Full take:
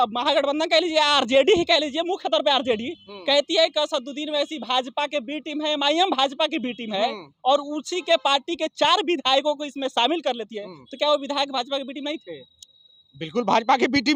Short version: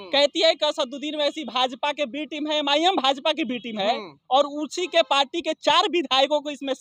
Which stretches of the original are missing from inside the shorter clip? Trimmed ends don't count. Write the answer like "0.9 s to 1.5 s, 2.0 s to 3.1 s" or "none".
none